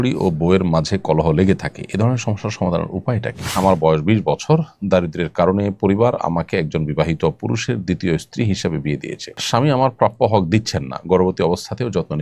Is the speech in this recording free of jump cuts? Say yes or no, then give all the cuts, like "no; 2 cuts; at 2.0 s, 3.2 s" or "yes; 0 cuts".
no; 2 cuts; at 3.5 s, 9.4 s